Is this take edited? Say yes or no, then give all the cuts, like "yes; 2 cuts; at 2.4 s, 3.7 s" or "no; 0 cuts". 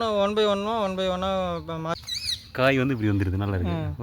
yes; 1 cut; at 2.0 s